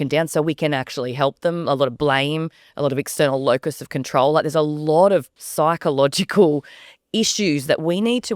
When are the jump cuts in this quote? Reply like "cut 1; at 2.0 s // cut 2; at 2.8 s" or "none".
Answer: cut 1; at 5.4 s